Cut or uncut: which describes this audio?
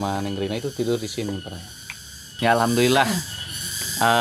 cut